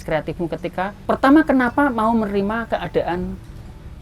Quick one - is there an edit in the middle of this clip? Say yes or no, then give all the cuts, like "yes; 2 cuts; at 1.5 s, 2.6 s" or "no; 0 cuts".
yes; 1 cut; at 1.0 s